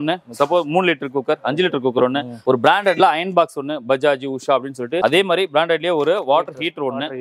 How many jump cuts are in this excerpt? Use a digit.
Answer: 2